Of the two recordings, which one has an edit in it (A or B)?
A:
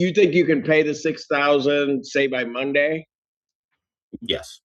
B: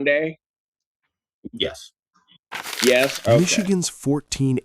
B